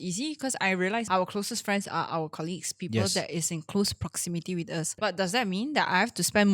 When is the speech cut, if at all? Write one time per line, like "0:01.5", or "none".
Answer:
0:01.1
0:04.9